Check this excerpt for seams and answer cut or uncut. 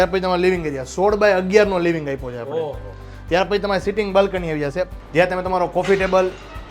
cut